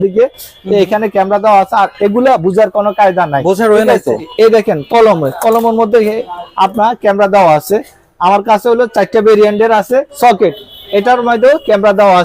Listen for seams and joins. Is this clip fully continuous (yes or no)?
no